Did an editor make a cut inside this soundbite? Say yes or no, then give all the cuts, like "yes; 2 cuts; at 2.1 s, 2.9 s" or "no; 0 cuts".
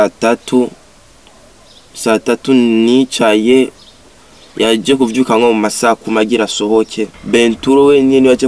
yes; 1 cut; at 7.2 s